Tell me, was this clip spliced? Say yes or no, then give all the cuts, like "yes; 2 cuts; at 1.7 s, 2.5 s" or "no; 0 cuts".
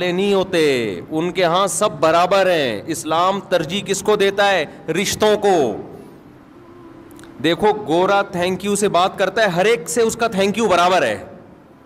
no; 0 cuts